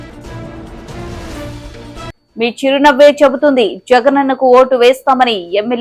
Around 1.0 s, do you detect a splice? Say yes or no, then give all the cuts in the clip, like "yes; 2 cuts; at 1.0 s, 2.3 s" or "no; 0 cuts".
yes; 1 cut; at 1.0 s